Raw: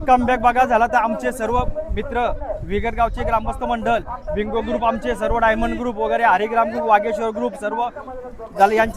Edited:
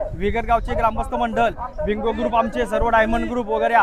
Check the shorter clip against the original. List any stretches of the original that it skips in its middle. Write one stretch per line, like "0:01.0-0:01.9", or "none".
none